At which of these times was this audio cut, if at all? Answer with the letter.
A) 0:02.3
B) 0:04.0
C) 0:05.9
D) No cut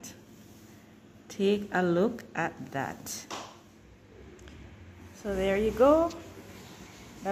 B